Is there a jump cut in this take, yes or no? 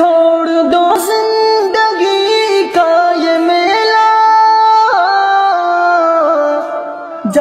yes